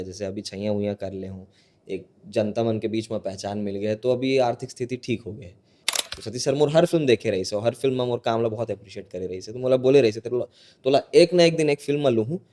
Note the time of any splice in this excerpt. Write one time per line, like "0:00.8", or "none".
0:05.9